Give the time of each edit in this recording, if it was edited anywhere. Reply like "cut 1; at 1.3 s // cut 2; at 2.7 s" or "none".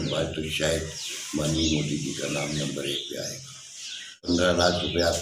cut 1; at 4.3 s

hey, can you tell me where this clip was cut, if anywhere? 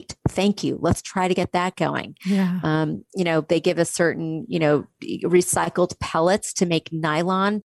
none

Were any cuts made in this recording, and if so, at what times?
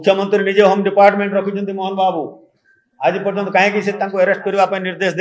none

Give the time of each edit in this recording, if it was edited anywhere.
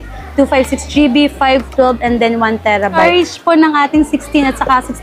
cut 1; at 3.0 s

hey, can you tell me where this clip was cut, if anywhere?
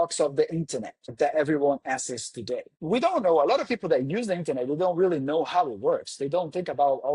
cut 1; at 1.1 s // cut 2; at 2.7 s

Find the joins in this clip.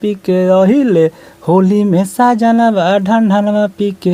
none

